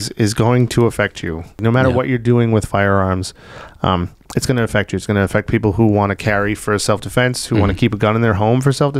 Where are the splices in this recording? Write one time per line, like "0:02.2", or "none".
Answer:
0:01.6

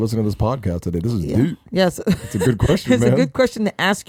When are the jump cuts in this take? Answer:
none

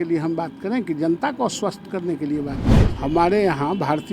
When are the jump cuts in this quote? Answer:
0:02.8

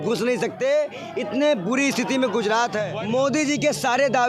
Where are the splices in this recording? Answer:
0:02.8

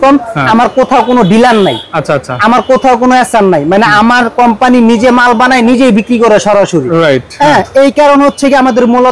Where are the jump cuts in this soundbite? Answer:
none

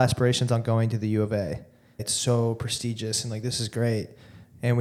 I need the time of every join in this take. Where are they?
0:02.0

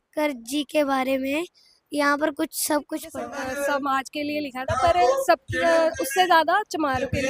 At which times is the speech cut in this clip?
0:03.2

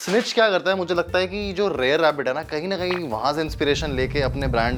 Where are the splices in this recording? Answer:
none

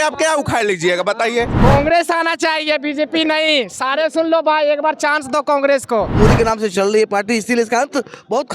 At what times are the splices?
0:01.5
0:06.1

